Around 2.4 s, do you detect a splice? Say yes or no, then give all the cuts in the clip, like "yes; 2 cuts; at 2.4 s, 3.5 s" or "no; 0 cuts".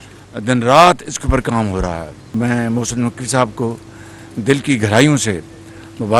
yes; 1 cut; at 2.4 s